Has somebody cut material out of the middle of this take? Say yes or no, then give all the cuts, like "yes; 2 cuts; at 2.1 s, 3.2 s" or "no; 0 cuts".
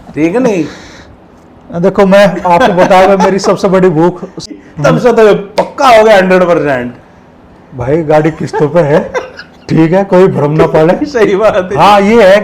yes; 1 cut; at 4.5 s